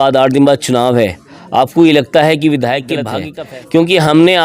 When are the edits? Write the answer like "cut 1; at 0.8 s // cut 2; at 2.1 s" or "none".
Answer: cut 1; at 3.2 s

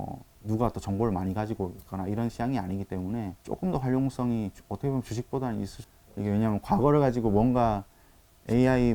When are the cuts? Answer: cut 1; at 3.4 s // cut 2; at 5.8 s

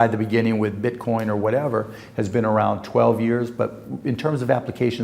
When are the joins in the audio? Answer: none

